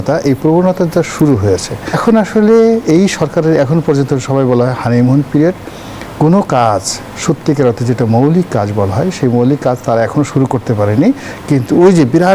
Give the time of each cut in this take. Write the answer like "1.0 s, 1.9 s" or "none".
2.0 s